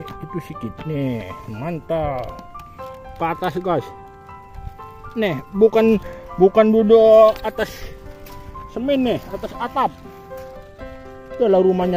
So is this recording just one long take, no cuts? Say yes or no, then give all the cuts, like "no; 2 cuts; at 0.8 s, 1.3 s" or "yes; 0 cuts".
yes; 0 cuts